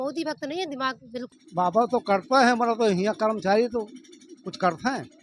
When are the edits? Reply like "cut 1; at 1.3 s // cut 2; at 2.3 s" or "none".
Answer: cut 1; at 1.3 s

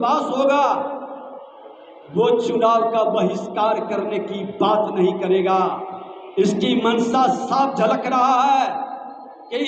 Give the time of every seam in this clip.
none

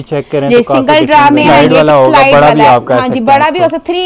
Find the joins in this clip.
cut 1; at 1.5 s

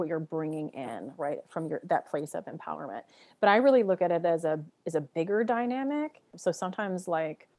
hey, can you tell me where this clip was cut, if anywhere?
cut 1; at 6.2 s

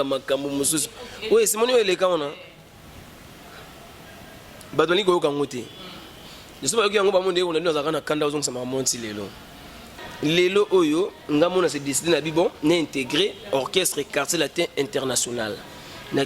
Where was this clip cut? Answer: cut 1; at 10.0 s

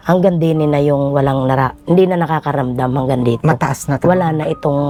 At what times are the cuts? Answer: none

